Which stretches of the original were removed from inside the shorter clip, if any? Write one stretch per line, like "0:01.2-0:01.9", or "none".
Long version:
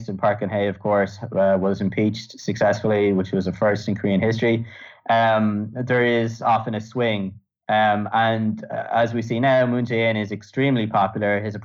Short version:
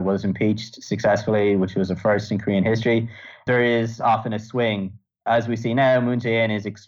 0:04.9-0:05.7
0:07.5-0:08.7